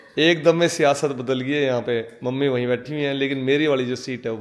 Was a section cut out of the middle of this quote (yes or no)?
no